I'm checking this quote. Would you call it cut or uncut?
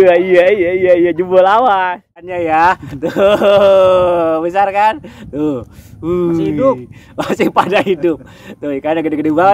cut